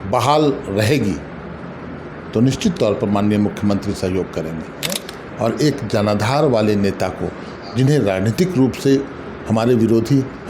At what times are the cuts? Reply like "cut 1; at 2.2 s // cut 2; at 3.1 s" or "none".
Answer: cut 1; at 5.1 s